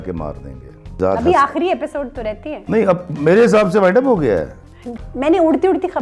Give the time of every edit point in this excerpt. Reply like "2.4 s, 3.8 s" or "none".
1.0 s, 5.0 s